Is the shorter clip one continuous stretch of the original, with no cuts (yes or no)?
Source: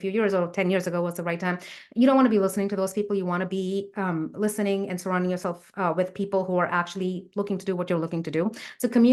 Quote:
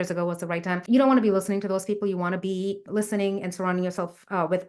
no